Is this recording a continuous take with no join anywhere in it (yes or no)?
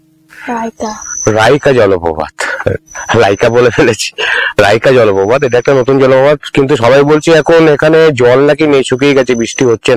yes